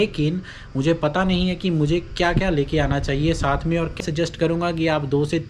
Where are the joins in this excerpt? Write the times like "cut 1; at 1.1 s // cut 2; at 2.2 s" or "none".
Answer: cut 1; at 4.0 s